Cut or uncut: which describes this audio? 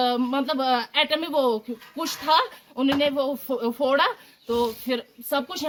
uncut